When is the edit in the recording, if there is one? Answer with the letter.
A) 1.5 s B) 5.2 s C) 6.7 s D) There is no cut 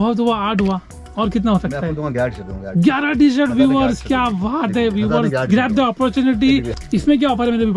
C